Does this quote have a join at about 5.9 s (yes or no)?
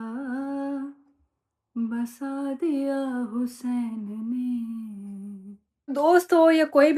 yes